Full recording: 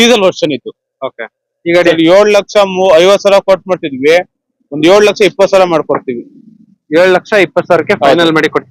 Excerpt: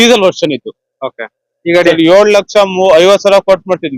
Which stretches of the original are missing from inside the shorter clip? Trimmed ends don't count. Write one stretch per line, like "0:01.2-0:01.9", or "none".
none

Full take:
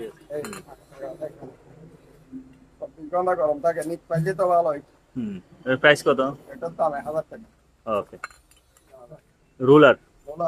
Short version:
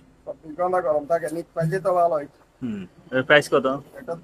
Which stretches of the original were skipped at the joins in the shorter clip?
none

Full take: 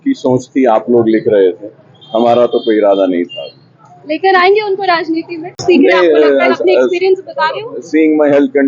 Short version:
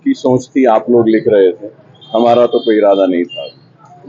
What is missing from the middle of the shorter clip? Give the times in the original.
none

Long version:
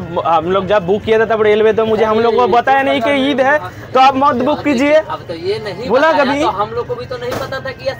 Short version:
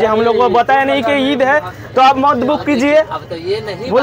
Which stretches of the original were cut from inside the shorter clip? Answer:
none

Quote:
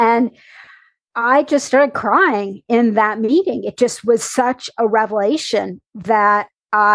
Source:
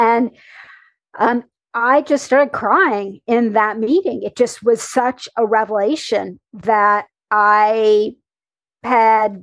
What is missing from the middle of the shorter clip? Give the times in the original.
0:01.0-0:01.6

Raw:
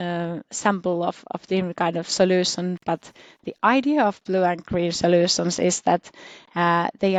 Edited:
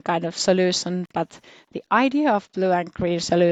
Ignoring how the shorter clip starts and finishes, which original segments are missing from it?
none

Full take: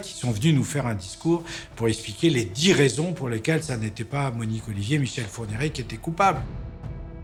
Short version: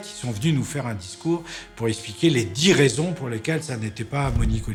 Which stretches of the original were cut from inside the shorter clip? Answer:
none

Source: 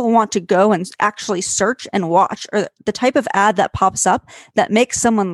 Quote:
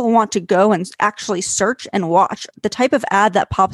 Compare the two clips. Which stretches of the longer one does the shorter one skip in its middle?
0:02.5-0:02.7

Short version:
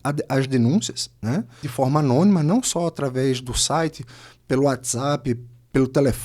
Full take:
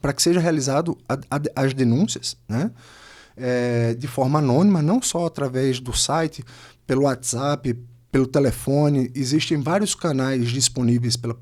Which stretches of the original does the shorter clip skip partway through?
0:02.9-0:04.0

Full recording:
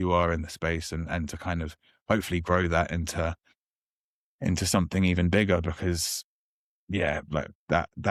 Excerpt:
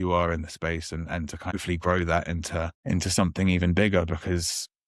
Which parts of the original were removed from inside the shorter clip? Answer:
0:01.5-0:02.2
0:03.4-0:04.3

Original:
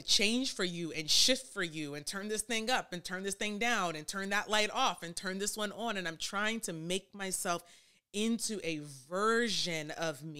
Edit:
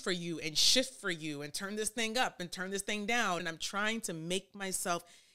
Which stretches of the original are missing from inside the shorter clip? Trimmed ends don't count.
0:04.0-0:06.0

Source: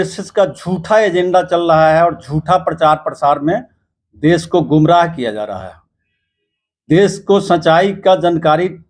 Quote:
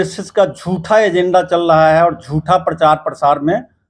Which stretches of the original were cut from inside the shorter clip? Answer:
none

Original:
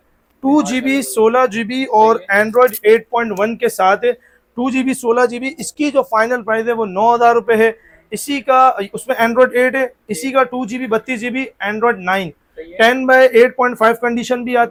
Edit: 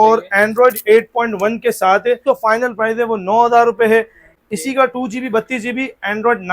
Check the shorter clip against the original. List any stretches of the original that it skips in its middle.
0:04.2-0:05.9
0:08.1-0:10.0

